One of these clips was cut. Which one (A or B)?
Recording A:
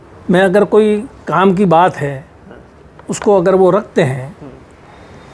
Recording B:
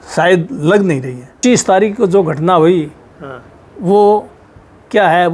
B